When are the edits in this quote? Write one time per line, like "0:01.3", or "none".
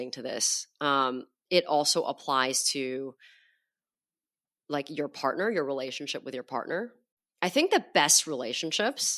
0:07.0